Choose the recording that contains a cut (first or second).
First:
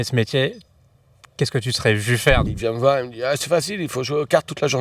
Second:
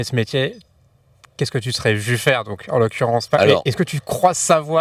first